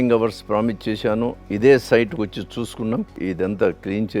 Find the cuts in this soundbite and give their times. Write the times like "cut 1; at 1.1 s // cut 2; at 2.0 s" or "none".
cut 1; at 3.2 s